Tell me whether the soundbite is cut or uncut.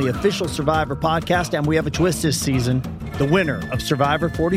uncut